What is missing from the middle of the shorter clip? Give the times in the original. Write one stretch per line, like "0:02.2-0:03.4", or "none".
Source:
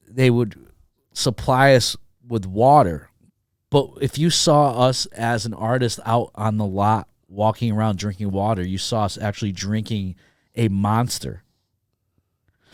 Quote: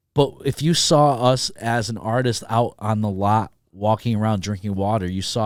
none